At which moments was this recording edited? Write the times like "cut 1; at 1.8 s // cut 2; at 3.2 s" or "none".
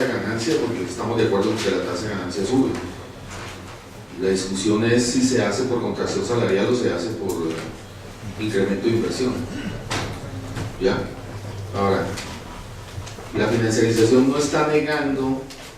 cut 1; at 12.6 s